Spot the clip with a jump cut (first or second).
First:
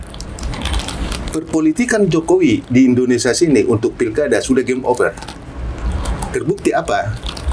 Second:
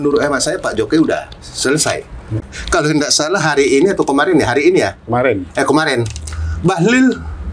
second